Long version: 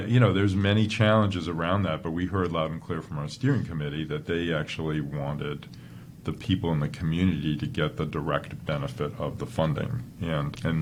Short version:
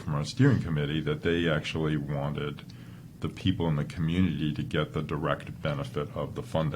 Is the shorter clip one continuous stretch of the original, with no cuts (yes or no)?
yes